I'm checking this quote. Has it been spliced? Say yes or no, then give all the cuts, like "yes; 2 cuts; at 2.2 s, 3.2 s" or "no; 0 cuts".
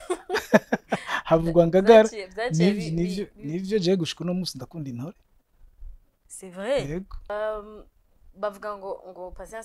yes; 1 cut; at 7.3 s